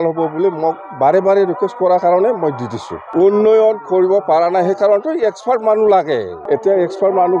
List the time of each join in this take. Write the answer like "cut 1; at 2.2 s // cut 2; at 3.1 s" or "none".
cut 1; at 3.0 s // cut 2; at 6.3 s